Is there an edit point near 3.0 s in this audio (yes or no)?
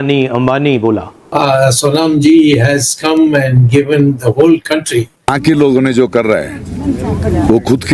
no